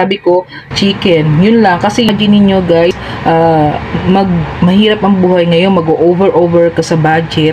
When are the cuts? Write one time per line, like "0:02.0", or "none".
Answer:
0:02.1